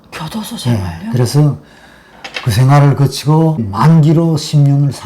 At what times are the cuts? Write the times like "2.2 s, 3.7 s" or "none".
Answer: 3.7 s